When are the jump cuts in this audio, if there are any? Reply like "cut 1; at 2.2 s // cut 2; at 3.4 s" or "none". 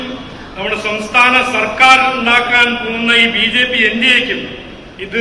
none